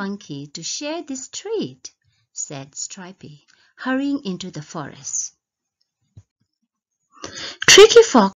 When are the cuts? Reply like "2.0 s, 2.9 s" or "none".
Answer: none